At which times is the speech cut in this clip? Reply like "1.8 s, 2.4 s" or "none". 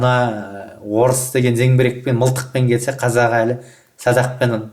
none